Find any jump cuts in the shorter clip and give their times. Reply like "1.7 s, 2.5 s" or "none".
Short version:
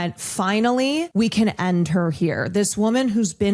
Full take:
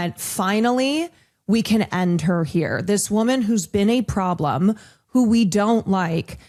1.1 s